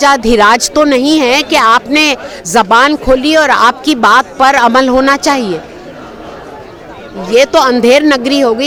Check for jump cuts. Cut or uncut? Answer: uncut